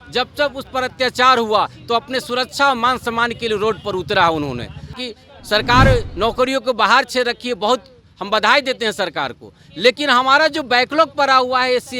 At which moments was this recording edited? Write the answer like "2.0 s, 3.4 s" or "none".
5.0 s